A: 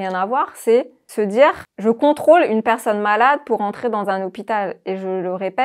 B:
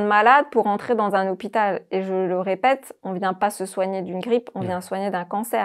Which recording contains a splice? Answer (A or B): A